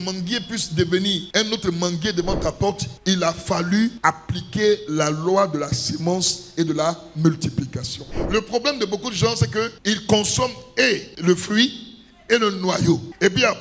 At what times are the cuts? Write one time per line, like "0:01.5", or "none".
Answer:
0:08.1